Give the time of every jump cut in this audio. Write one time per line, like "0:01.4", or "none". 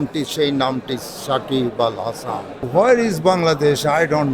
0:02.6